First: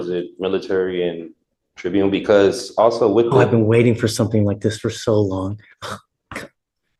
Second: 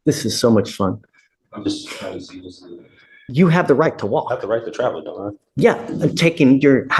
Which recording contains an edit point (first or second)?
second